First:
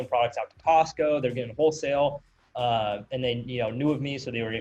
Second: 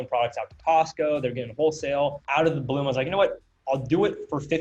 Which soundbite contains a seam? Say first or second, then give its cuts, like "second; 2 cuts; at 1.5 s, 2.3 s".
second; 1 cut; at 2.2 s